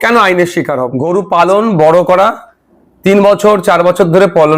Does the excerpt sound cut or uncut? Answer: cut